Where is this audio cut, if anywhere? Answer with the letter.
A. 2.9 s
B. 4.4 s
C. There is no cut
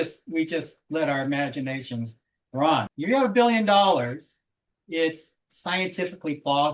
A